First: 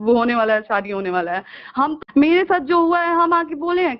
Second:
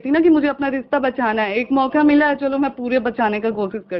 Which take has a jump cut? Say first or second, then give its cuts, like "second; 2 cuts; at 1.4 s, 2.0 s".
first; 1 cut; at 2.0 s